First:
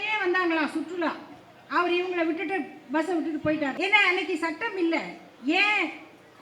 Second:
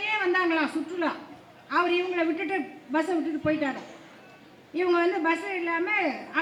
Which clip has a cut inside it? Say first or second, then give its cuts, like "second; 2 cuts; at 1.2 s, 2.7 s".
first; 1 cut; at 3.8 s